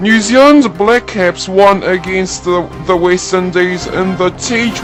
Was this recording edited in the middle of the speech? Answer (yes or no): no